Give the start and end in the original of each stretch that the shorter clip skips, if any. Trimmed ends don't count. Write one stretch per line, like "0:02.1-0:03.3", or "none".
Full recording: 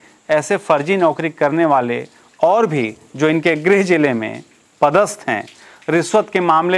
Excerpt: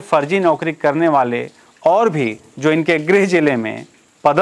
none